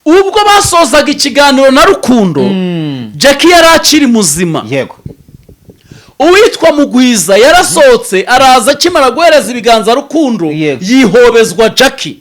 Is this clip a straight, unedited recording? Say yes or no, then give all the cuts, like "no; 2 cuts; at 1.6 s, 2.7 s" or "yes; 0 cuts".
yes; 0 cuts